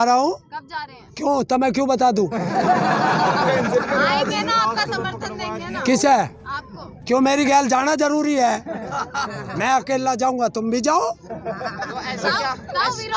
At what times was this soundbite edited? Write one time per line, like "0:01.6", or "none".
none